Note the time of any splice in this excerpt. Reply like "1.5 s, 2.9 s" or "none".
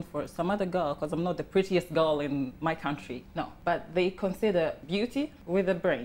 3.5 s, 5.1 s